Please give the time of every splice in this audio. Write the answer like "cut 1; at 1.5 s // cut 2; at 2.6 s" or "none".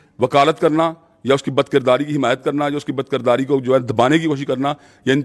none